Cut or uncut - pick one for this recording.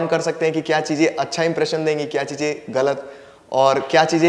uncut